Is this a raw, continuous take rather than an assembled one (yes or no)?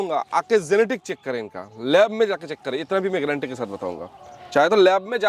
yes